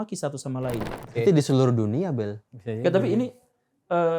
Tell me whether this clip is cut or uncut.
cut